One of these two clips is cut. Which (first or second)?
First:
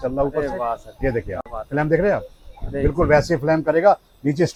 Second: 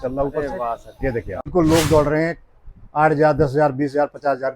second